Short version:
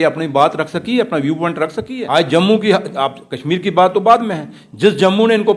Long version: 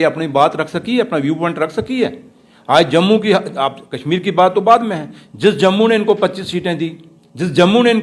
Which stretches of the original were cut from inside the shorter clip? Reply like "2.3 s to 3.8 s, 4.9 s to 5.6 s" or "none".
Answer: 1.9 s to 2.5 s